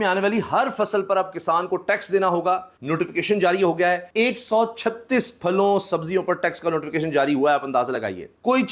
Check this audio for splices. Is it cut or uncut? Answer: uncut